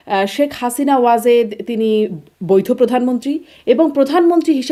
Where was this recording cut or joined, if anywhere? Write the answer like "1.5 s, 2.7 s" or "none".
none